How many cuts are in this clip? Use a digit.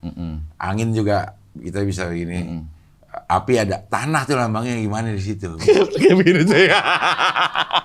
1